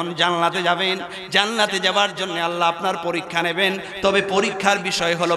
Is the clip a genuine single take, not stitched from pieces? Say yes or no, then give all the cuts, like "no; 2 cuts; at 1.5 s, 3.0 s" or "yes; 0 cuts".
yes; 0 cuts